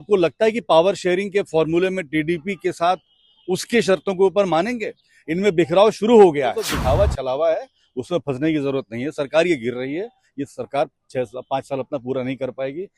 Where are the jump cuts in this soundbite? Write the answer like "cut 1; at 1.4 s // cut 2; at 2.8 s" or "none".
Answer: cut 1; at 6.7 s